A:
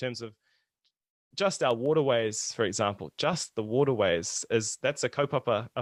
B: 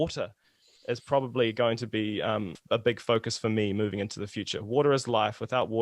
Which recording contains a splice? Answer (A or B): B